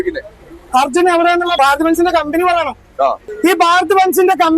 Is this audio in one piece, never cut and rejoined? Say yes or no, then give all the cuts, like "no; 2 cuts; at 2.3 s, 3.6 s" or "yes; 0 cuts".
no; 2 cuts; at 1.6 s, 3.2 s